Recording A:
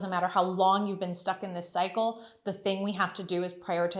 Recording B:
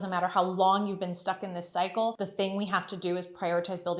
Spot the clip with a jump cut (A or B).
B